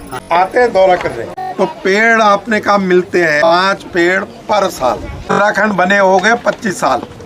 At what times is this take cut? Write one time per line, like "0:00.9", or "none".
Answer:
0:01.5
0:03.5
0:05.1